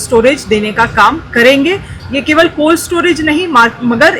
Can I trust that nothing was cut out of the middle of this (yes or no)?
yes